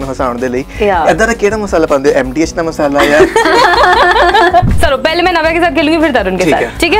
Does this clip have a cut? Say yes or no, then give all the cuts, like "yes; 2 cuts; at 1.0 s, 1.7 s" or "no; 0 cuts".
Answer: yes; 1 cut; at 4.7 s